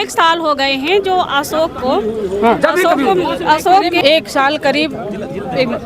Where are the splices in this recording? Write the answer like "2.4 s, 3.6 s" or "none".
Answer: 4.0 s